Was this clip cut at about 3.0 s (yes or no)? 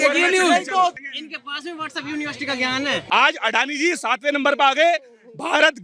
yes